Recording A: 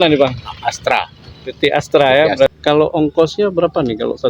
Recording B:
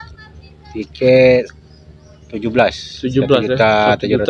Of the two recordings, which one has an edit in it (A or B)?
A